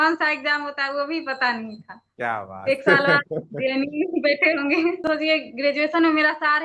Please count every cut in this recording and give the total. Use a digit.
1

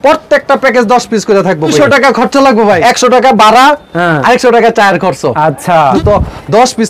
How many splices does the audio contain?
3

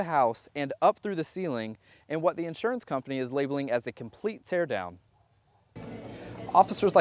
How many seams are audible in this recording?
1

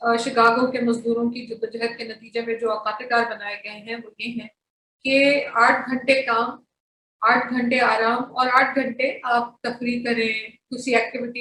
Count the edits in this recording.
0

